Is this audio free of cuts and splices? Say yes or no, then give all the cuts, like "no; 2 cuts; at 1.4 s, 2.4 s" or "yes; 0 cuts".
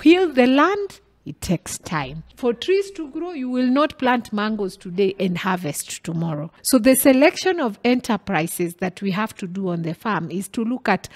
no; 2 cuts; at 2.2 s, 6.5 s